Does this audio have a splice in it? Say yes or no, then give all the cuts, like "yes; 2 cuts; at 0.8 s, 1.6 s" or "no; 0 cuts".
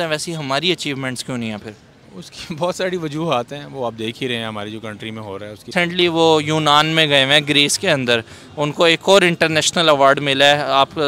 yes; 1 cut; at 5.7 s